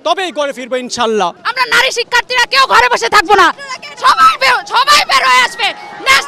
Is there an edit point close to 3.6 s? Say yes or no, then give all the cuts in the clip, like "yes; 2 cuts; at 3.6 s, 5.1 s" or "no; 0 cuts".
no; 1 cut; at 1.4 s